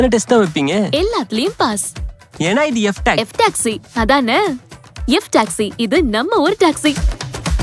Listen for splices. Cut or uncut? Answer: uncut